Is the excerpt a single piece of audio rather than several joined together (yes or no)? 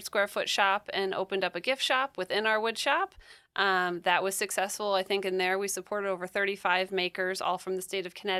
yes